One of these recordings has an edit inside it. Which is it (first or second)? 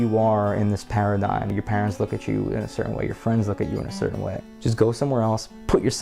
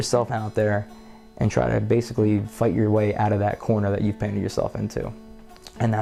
first